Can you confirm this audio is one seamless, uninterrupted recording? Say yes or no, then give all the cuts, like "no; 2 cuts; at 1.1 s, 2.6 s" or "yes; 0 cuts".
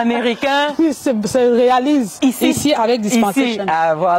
yes; 0 cuts